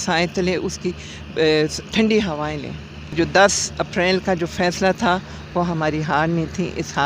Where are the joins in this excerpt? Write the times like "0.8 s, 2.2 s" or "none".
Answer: 3.1 s

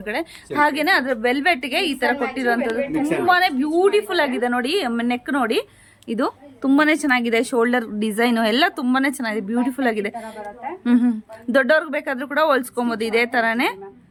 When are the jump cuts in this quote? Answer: none

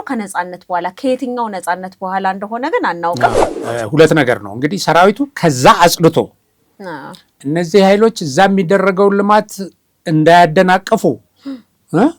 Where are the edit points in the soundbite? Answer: 3.5 s

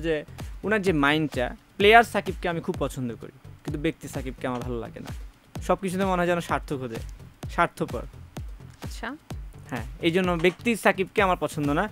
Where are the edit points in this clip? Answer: none

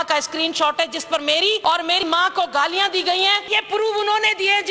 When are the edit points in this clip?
1.6 s, 3.5 s

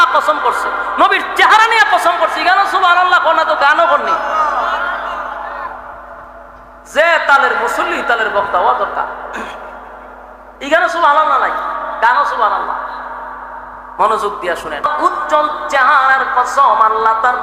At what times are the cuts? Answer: 14.9 s

